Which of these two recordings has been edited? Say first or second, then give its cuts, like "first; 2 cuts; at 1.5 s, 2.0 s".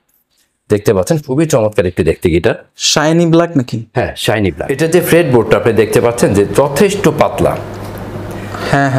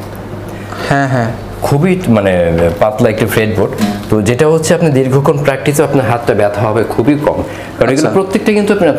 first; 1 cut; at 4.6 s